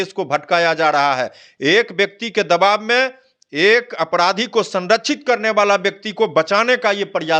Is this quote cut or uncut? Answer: uncut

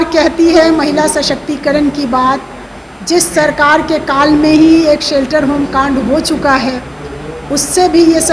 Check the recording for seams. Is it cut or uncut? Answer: uncut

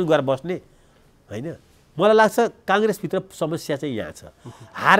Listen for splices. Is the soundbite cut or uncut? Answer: cut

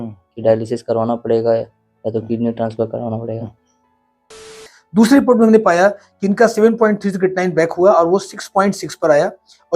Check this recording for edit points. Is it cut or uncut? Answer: cut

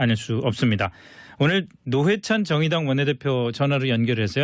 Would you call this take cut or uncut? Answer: uncut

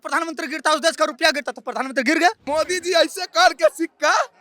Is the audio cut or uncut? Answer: cut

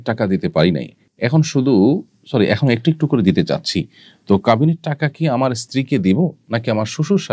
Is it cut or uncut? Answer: uncut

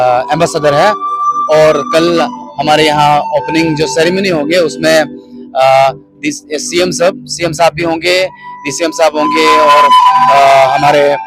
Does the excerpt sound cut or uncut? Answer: uncut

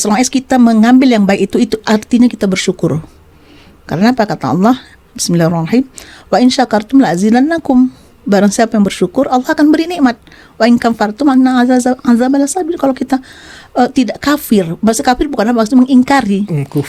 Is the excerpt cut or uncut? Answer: uncut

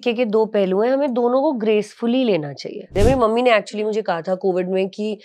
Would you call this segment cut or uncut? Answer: cut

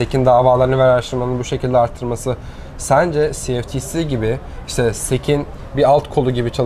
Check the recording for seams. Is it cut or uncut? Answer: uncut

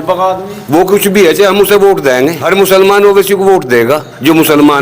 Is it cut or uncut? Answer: cut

